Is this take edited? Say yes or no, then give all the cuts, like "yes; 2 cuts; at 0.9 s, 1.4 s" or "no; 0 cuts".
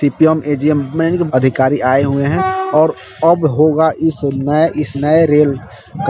yes; 1 cut; at 1.3 s